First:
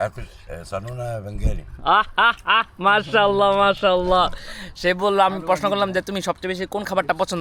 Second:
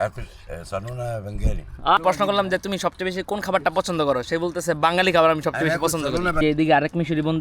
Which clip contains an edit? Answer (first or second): second